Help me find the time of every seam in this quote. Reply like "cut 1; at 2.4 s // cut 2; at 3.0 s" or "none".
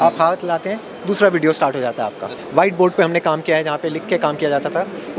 cut 1; at 2.3 s